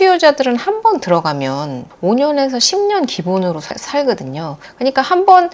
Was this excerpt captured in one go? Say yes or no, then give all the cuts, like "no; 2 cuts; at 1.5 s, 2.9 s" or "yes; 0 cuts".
no; 1 cut; at 1.9 s